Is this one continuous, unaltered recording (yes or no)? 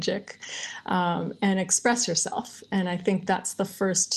yes